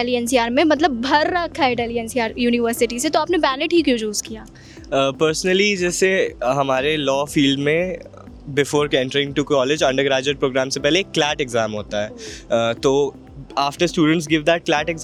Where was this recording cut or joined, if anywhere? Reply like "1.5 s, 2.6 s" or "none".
none